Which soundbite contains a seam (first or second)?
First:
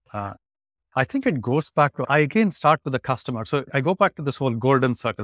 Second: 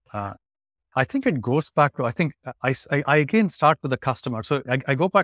first